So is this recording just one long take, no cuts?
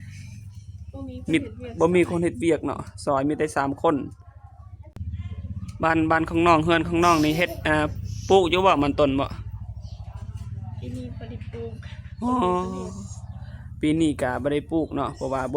no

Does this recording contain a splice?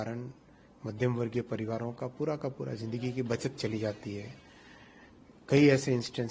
no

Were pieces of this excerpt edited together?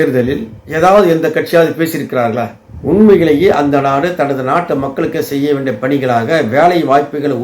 yes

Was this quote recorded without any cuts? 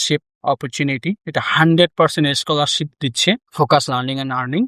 no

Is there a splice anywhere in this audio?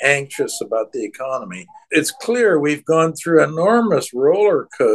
yes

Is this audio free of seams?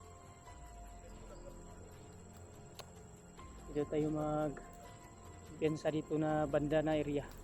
yes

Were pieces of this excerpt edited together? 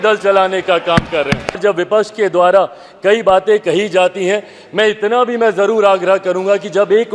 yes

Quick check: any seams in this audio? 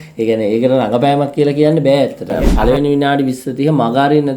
yes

